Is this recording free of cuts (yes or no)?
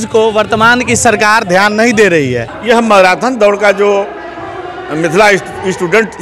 no